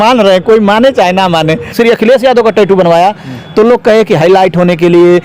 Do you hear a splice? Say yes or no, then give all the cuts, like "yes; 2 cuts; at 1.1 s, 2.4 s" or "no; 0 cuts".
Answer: yes; 1 cut; at 1.7 s